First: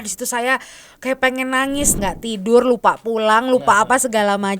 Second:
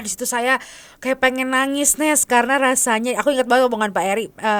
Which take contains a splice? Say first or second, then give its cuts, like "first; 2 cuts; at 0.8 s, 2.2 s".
first; 1 cut; at 2.0 s